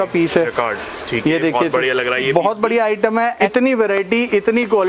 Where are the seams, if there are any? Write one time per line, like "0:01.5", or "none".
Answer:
0:03.4